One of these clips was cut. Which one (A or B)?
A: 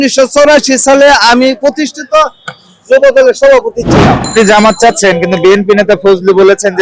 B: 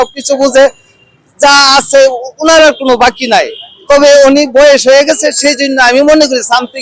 A